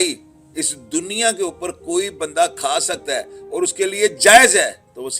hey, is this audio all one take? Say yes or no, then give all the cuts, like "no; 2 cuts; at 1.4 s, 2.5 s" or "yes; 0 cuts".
yes; 0 cuts